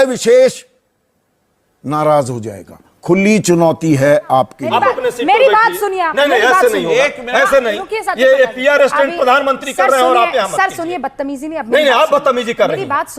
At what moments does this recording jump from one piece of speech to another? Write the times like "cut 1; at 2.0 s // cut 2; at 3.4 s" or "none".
cut 1; at 4.6 s